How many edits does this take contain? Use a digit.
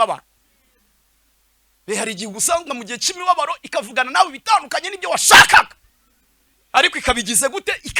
0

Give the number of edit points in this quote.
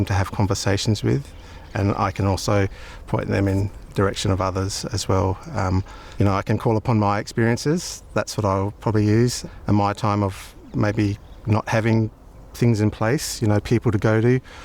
0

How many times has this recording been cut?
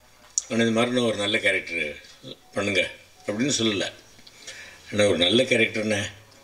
0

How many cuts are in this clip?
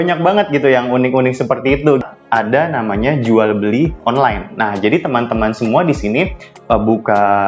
1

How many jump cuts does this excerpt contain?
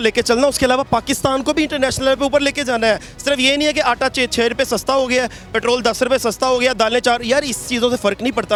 0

